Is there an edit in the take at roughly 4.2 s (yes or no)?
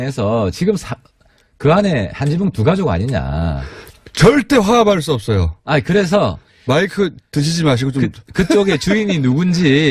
yes